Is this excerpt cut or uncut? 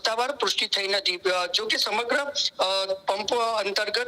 uncut